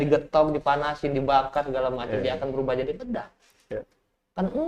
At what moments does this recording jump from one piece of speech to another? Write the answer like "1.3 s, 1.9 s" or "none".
none